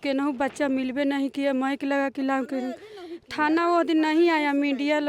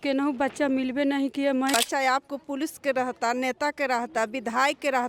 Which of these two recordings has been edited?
second; 1 cut; at 1.7 s

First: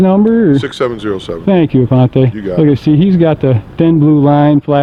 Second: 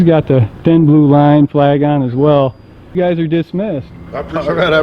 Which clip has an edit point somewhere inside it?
second; 1 cut; at 2.8 s

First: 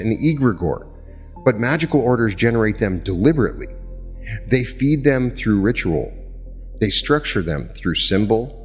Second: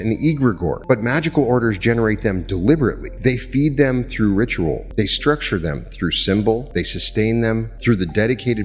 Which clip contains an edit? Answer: second; 5 cuts; at 0.8 s, 3.1 s, 4.8 s, 6.7 s, 7.7 s

